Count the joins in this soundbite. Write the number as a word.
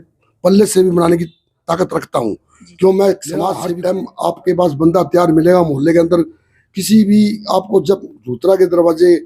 one